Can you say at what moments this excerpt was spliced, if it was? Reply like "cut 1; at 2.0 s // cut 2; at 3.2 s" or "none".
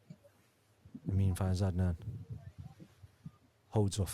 cut 1; at 1.0 s

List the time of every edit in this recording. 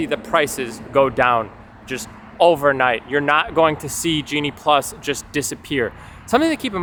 none

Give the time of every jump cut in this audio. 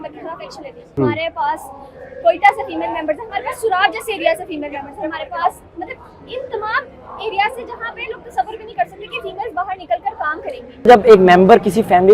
cut 1; at 1.0 s // cut 2; at 10.9 s

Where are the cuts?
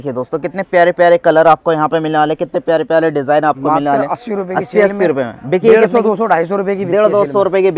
none

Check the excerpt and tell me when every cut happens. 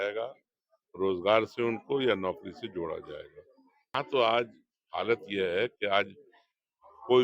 cut 1; at 3.9 s

